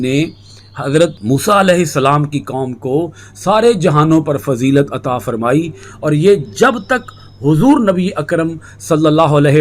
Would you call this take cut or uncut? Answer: cut